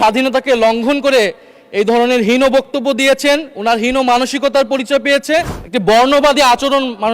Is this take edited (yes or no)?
yes